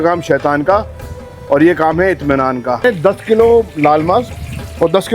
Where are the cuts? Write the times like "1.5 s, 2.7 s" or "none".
2.8 s

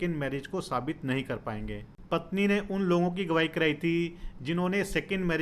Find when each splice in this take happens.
2.0 s

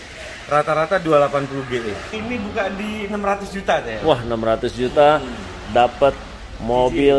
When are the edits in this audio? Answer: 2.2 s

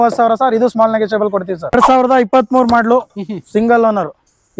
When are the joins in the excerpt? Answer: 1.7 s

